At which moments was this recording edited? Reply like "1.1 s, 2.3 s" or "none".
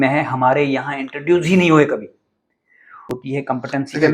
3.1 s